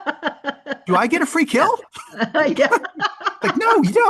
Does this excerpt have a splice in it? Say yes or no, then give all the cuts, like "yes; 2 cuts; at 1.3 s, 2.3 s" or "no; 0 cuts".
no; 0 cuts